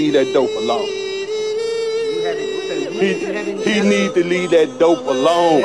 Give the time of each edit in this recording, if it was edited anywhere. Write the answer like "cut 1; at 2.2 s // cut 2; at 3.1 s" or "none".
none